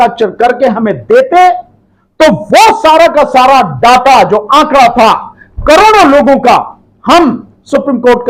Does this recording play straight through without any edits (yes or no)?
yes